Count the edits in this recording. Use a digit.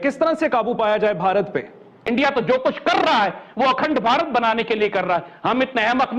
1